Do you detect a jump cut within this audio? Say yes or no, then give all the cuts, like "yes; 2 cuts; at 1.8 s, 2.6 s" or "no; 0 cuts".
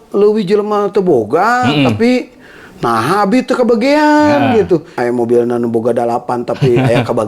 yes; 1 cut; at 4.9 s